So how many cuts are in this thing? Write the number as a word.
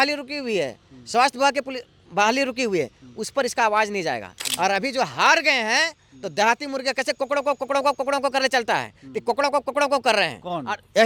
zero